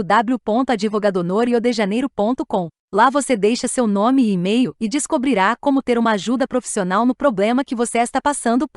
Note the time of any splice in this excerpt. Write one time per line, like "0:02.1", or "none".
none